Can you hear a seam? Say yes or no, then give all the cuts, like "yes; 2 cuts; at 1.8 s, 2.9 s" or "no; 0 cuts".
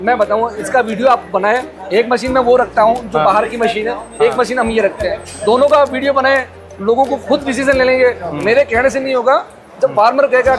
no; 0 cuts